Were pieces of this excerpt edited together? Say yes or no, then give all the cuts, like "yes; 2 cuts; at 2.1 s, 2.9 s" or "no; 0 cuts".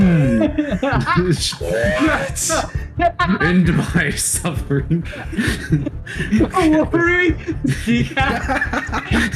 no; 0 cuts